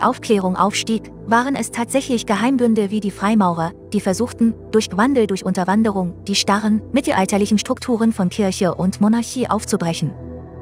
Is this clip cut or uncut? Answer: uncut